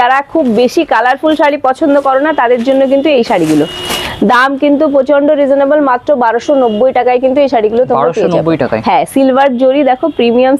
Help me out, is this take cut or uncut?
uncut